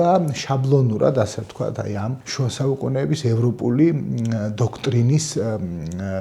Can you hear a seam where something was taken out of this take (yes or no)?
yes